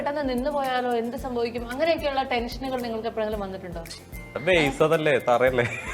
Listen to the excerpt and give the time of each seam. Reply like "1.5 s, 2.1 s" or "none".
4.3 s